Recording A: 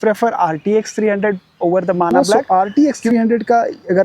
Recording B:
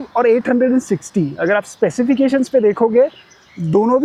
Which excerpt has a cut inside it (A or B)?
A